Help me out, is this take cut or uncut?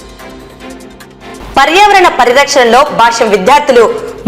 cut